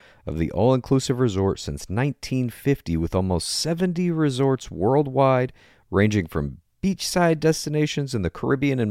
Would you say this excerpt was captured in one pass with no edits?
yes; 0 cuts

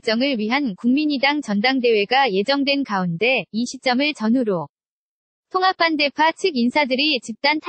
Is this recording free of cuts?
yes; 0 cuts

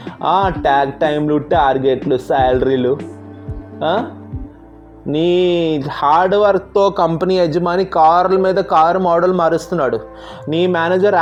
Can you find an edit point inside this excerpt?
no; 0 cuts

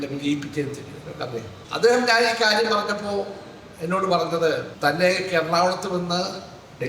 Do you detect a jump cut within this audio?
yes; 2 cuts; at 1.6 s, 4.7 s

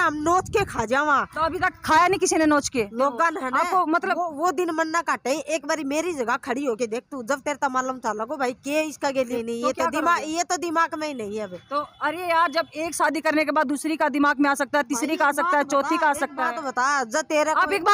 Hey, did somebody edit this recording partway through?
yes; 2 cuts; at 2.9 s, 9.3 s

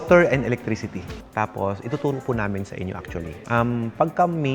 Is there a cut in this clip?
yes; 1 cut; at 1.1 s

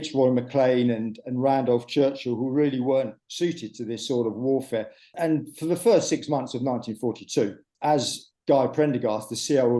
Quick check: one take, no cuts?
no; 1 cut; at 5.1 s

